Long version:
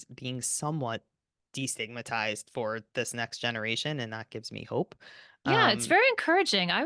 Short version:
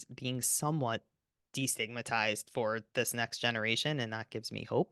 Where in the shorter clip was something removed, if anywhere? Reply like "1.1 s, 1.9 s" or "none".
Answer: none